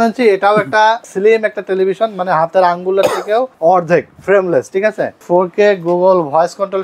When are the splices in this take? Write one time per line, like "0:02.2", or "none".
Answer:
0:01.1
0:03.5
0:05.2